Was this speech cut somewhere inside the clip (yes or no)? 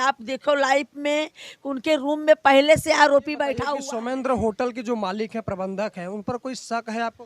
yes